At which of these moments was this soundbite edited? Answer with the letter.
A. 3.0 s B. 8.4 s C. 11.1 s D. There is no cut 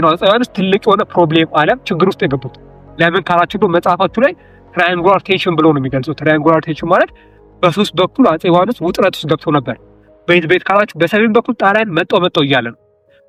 D